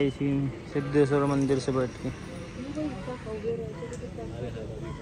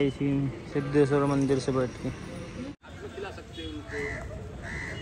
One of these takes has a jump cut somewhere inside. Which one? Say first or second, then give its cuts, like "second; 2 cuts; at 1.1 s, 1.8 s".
second; 1 cut; at 2.7 s